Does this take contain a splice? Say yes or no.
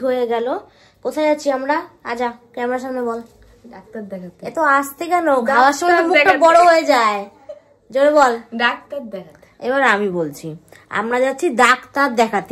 no